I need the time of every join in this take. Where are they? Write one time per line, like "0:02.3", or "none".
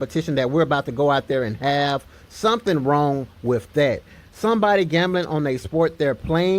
0:05.1